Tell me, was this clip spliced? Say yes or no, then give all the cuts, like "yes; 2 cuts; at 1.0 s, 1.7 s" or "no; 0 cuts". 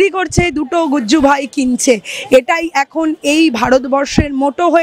no; 0 cuts